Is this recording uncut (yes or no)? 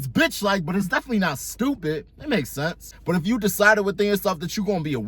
no